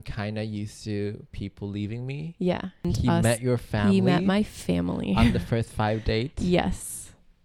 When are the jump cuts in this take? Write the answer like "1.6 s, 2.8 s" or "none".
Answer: 2.9 s